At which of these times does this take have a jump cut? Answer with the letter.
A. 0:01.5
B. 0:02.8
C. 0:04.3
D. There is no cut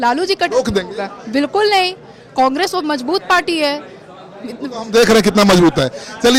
D